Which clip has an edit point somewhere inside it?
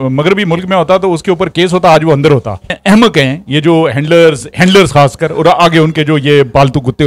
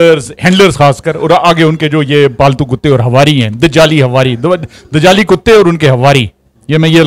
first; 1 cut; at 2.7 s

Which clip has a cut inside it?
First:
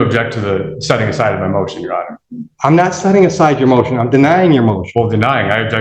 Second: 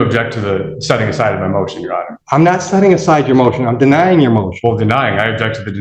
second; 1 cut; at 2.1 s

